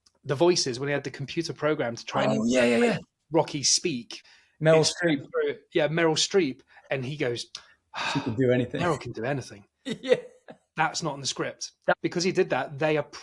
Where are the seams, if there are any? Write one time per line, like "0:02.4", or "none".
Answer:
0:04.2
0:11.9